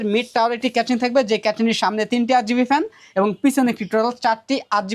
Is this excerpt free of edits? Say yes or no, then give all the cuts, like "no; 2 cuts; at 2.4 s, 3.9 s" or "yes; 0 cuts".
yes; 0 cuts